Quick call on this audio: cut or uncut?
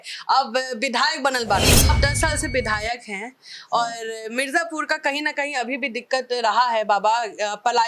cut